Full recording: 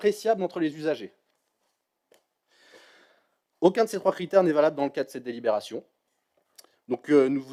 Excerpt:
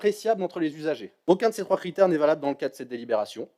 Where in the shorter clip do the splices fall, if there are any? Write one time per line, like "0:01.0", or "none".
0:01.1